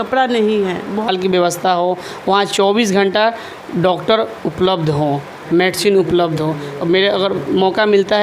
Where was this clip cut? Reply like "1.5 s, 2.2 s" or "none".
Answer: 1.1 s